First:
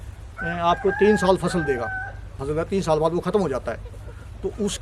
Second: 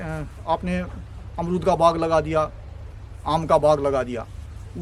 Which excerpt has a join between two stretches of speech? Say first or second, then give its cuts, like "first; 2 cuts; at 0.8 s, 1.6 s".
first; 1 cut; at 2.4 s